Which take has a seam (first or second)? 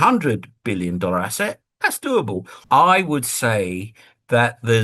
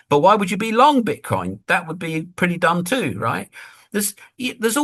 first